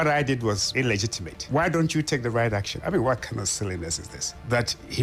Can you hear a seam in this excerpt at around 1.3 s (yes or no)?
no